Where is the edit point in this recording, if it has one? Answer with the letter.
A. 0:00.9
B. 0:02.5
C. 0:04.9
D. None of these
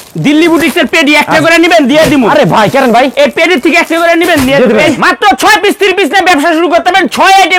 C